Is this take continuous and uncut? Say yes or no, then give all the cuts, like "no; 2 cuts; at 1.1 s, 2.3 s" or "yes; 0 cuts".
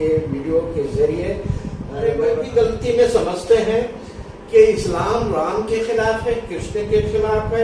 no; 1 cut; at 1.9 s